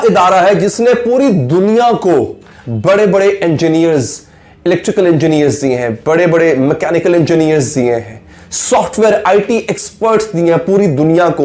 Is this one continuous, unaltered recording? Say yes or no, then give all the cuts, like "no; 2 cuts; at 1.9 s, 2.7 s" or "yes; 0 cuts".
yes; 0 cuts